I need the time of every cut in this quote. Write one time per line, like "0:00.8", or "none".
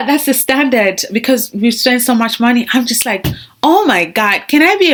none